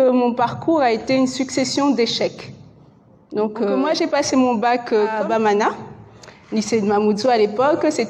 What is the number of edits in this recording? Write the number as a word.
two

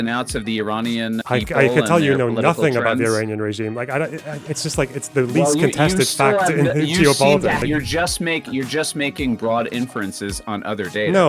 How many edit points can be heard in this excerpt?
two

